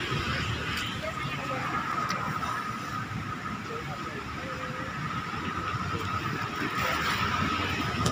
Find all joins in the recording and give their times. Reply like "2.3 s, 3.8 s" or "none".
none